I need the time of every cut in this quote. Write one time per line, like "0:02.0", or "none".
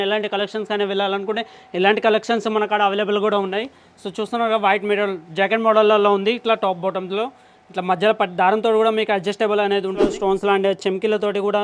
0:10.1